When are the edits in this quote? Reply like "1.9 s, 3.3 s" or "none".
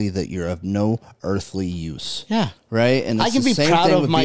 none